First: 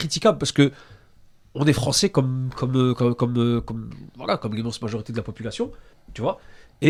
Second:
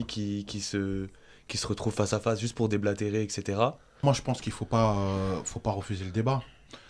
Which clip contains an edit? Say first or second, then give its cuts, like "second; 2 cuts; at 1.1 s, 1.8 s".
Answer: second; 1 cut; at 4.0 s